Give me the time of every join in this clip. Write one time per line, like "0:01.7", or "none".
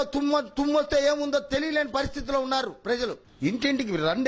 0:03.3